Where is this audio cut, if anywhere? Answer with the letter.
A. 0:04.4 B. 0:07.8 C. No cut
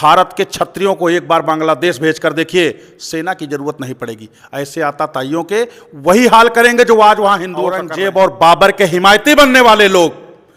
B